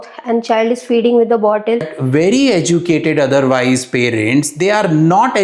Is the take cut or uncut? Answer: cut